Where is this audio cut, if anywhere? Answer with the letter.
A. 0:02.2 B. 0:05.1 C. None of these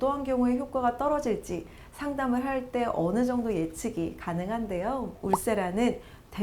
B